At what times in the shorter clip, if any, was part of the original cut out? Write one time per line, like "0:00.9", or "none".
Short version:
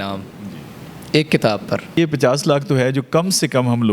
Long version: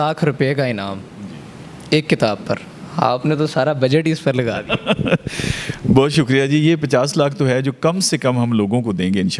0:02.0